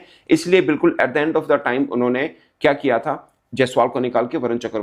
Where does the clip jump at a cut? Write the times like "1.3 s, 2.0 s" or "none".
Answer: none